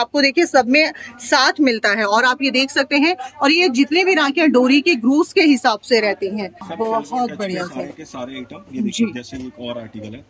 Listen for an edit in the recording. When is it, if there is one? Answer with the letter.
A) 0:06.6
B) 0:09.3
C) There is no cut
A